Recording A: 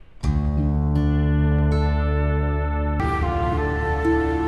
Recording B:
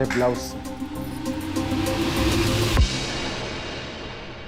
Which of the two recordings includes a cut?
A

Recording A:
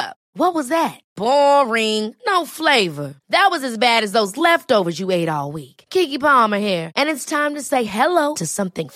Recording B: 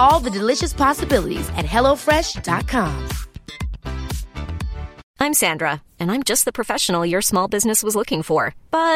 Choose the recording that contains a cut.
B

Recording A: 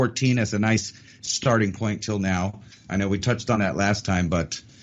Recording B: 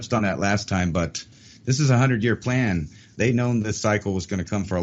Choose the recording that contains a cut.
B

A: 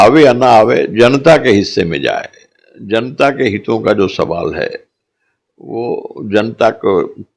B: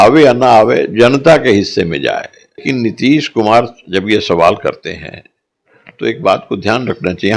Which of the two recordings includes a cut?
B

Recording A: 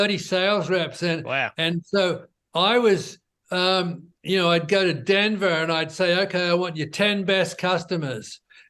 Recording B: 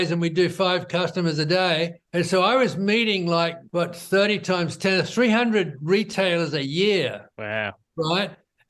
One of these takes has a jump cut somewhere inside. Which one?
B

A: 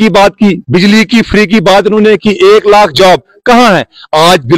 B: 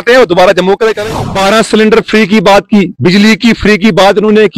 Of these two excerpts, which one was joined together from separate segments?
B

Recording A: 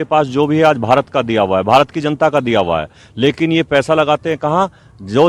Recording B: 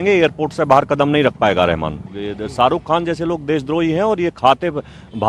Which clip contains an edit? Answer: B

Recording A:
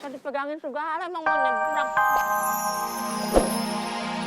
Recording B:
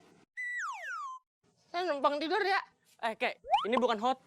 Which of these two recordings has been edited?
A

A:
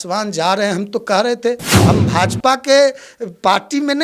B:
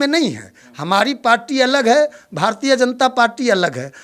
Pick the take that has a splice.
A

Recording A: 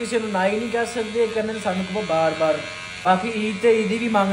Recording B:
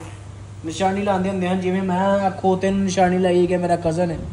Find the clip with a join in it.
A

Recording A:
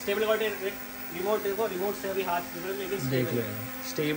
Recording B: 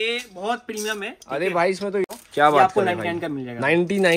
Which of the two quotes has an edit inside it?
B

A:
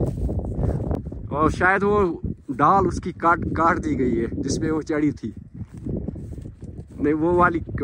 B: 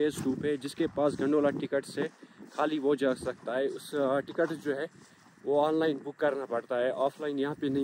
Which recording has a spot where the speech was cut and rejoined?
A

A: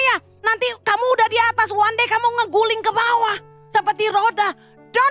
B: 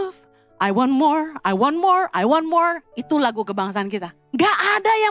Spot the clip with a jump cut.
B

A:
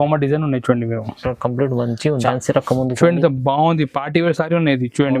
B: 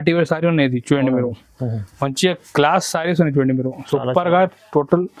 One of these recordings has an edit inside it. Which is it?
A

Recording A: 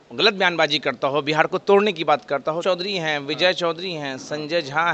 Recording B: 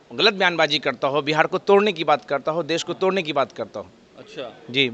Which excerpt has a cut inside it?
A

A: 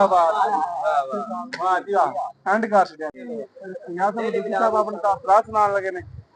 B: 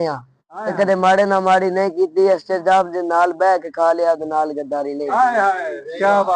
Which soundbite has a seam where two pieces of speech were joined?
A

